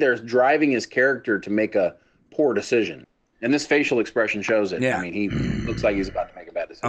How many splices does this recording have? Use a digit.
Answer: 1